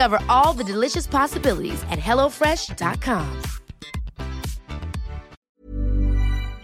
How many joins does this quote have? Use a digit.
1